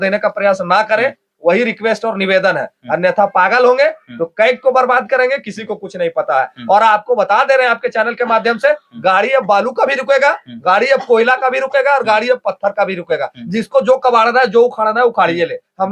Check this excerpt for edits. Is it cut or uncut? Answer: uncut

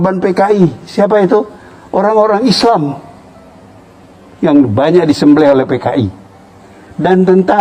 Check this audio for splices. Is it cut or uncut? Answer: uncut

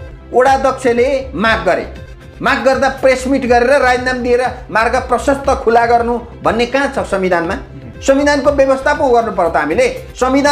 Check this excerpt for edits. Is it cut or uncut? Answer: uncut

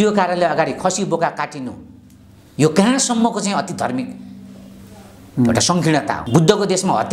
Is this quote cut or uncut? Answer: cut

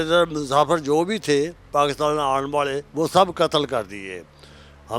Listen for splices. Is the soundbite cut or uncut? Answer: cut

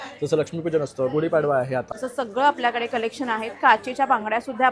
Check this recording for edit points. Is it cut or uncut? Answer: cut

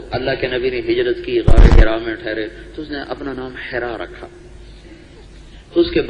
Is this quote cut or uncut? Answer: cut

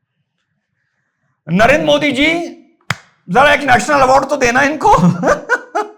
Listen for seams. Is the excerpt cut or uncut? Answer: uncut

